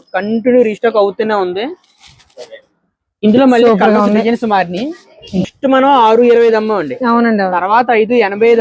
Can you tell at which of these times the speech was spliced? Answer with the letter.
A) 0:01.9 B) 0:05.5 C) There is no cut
B